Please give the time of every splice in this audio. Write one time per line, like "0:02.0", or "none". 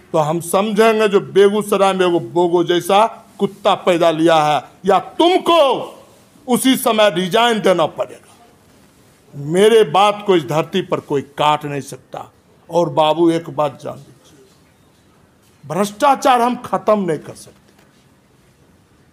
none